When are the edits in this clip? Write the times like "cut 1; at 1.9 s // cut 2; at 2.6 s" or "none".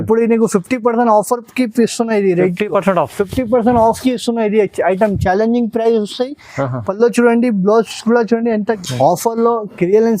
cut 1; at 8.7 s